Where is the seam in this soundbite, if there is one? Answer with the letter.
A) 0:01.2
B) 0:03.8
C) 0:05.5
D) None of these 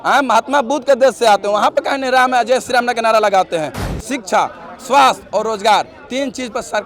B